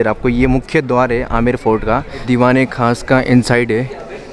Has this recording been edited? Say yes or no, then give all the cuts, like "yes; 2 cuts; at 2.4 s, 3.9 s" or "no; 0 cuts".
yes; 1 cut; at 2.2 s